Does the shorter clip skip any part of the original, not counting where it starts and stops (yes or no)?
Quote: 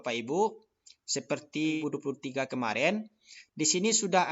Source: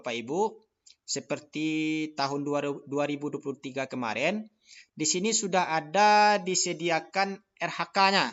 yes